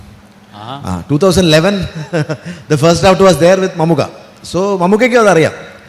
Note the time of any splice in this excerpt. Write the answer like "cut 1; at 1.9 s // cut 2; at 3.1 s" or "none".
none